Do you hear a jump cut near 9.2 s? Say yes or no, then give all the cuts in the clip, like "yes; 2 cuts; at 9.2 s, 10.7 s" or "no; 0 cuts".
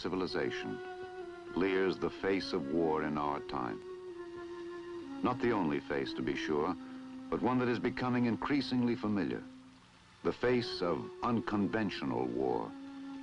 no; 1 cut; at 2.2 s